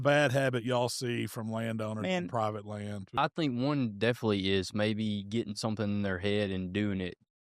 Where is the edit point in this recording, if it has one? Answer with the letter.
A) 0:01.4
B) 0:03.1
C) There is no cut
B